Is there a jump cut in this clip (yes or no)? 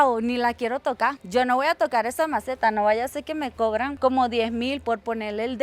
no